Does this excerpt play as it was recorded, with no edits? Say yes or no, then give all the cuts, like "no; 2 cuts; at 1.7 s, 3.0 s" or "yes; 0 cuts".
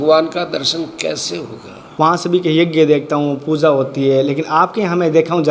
no; 1 cut; at 1.8 s